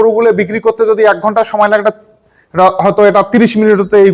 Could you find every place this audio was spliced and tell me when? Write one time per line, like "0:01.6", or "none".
none